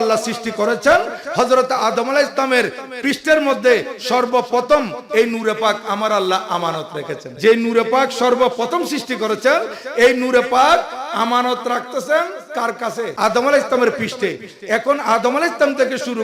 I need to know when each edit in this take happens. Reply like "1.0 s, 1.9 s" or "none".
7.2 s, 13.1 s